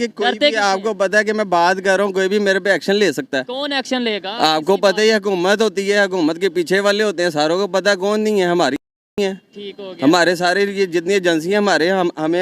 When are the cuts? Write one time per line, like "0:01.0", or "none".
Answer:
none

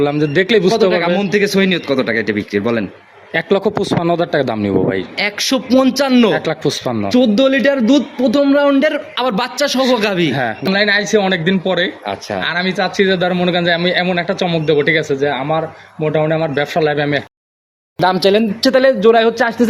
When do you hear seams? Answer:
0:10.7
0:17.7

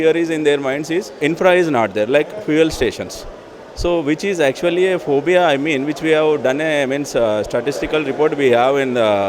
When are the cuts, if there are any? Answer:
0:01.1

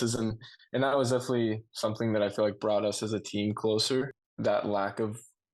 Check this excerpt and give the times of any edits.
0:04.1

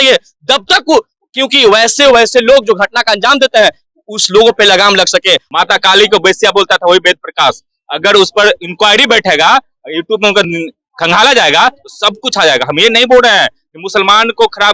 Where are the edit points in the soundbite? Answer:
0:05.5

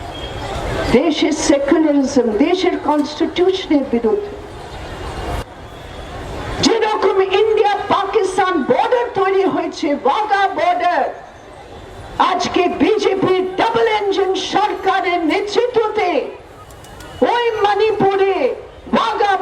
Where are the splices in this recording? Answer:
0:05.4

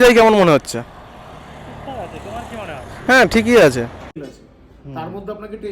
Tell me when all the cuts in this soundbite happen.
0:04.1

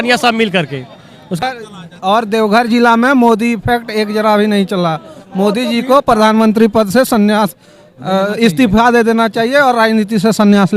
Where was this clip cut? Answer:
0:01.4

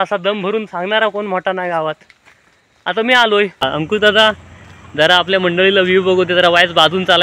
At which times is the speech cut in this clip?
0:03.9

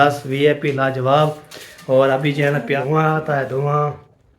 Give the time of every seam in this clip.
0:02.7

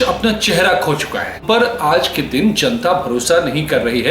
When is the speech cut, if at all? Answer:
0:01.4

